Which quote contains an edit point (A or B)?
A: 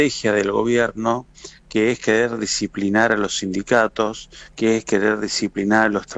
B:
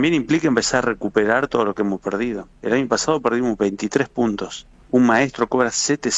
B